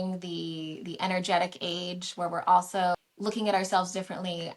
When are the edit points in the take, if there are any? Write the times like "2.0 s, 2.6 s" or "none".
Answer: 3.0 s